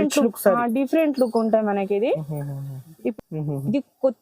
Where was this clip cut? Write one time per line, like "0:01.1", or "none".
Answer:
0:03.1